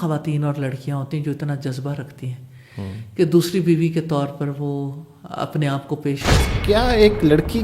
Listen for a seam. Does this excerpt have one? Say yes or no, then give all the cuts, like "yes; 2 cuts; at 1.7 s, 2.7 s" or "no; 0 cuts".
yes; 1 cut; at 6.6 s